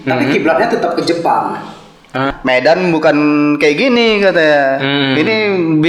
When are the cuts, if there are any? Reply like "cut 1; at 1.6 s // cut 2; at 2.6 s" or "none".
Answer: cut 1; at 2.3 s